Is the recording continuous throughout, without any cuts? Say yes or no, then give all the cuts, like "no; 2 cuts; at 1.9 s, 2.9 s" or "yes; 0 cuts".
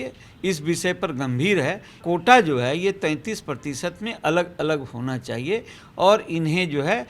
no; 1 cut; at 2.0 s